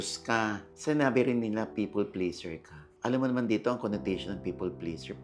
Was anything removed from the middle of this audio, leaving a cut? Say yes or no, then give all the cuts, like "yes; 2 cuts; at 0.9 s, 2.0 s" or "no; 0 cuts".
no; 0 cuts